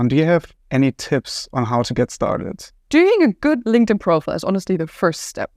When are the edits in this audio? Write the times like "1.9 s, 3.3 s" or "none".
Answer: 2.8 s